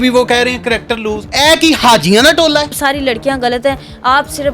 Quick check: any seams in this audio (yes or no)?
yes